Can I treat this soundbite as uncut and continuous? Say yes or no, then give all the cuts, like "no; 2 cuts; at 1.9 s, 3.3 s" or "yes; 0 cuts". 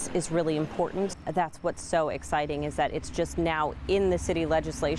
no; 1 cut; at 1.2 s